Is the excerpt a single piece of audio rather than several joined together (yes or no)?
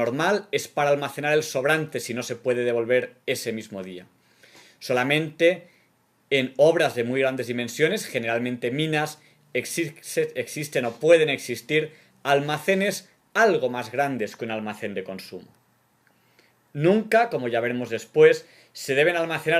no